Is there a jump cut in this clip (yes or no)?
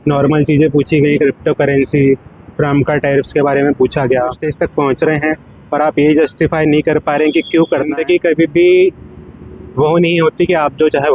yes